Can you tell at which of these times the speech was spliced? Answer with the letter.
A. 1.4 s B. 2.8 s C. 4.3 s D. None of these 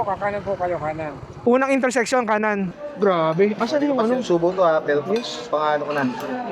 B